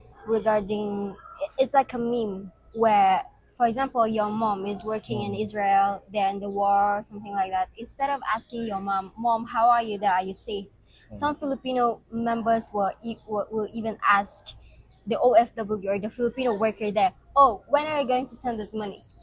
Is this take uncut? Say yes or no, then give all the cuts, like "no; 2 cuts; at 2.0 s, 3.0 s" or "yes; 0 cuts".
yes; 0 cuts